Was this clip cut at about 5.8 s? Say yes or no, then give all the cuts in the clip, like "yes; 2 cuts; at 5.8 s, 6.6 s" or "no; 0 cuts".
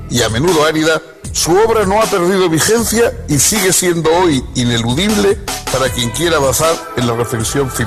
no; 1 cut; at 3.6 s